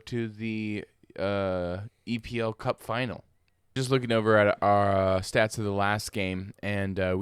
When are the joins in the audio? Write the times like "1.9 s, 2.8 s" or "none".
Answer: 3.8 s